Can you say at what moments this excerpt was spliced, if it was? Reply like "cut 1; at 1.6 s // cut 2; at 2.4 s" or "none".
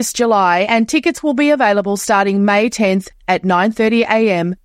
none